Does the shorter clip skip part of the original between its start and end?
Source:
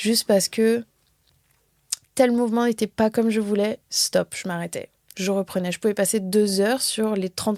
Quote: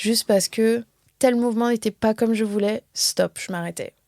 yes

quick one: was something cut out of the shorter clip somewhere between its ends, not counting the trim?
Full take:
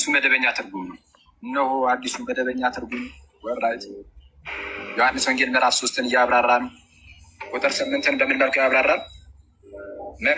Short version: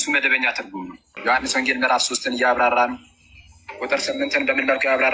yes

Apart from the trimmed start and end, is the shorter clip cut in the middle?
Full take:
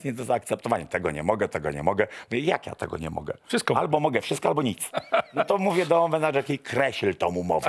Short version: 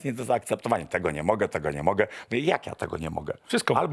no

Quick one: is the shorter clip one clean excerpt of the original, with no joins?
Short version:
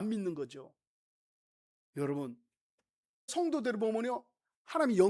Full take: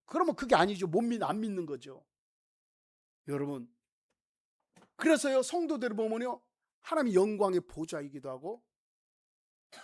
no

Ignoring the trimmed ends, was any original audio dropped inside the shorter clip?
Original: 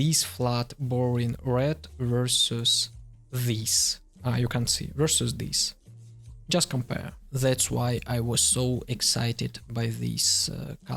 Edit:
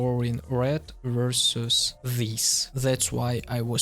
yes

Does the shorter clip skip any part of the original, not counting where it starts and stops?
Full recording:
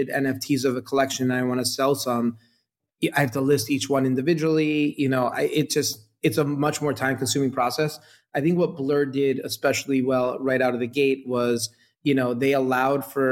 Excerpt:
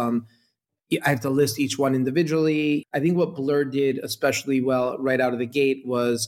yes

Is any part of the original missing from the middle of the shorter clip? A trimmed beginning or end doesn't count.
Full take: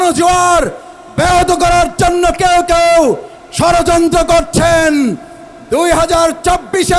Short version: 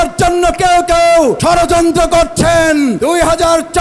yes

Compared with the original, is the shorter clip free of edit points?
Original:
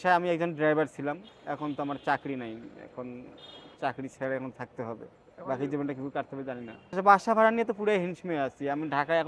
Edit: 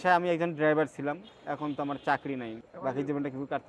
no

